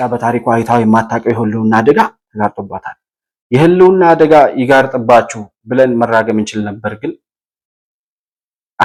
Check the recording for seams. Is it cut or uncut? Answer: uncut